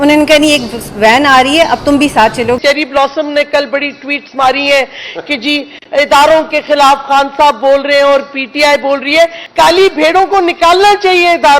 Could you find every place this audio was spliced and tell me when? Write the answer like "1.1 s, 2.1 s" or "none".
2.6 s, 9.4 s